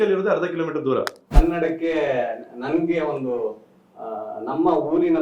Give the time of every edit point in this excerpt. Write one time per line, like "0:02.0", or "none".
0:01.2